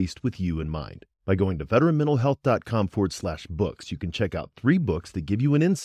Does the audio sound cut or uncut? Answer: uncut